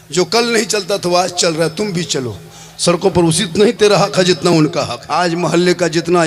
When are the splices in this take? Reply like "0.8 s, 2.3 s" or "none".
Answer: 4.9 s